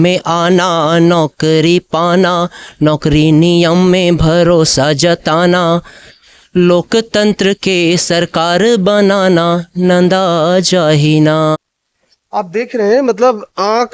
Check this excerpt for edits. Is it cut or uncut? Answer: cut